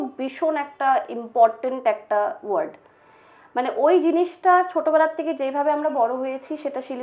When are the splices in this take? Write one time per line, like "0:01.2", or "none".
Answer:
none

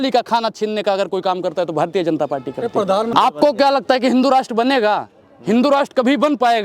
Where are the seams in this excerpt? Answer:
0:03.1

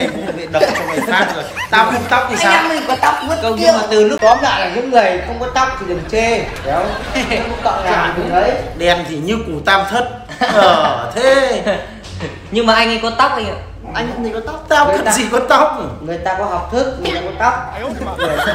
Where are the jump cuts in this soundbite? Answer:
0:04.2

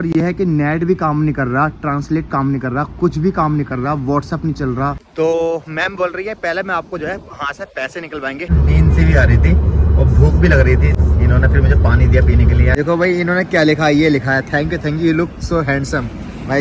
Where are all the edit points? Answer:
0:05.0
0:08.5
0:11.0
0:12.7

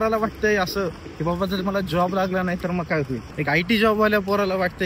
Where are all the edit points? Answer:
0:01.0

